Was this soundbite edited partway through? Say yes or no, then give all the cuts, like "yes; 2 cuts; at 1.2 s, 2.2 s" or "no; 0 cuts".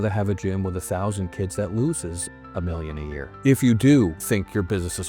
yes; 2 cuts; at 3.4 s, 4.2 s